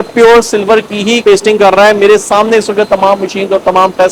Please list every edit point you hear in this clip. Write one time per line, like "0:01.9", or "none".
0:01.2